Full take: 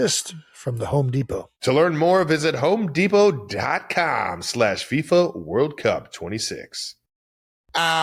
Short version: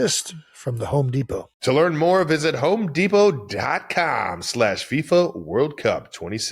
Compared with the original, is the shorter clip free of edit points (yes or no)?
yes